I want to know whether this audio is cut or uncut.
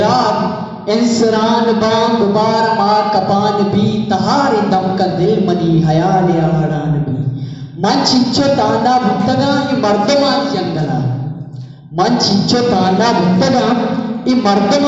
uncut